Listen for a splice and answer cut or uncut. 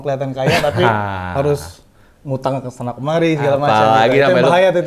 uncut